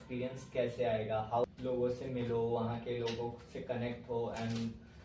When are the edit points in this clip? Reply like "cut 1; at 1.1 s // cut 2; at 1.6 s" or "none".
cut 1; at 1.4 s